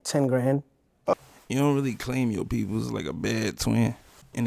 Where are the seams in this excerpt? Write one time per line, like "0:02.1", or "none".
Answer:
none